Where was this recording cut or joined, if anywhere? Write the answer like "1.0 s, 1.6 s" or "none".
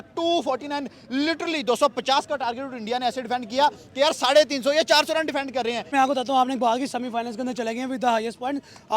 5.9 s